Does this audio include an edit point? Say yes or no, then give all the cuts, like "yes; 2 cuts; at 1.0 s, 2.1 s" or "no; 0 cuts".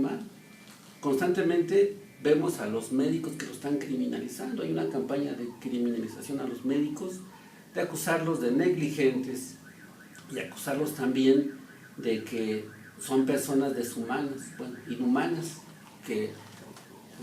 no; 0 cuts